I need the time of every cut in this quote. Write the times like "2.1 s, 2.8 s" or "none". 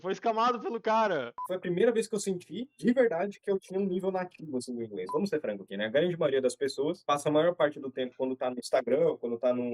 1.3 s, 5.1 s